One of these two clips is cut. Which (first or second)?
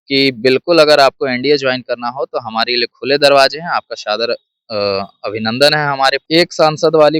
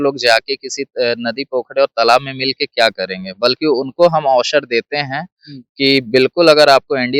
first